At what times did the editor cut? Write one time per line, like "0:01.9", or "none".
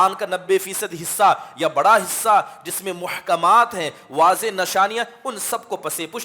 none